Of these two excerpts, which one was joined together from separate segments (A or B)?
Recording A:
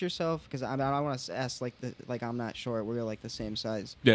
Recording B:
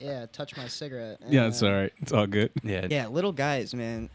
B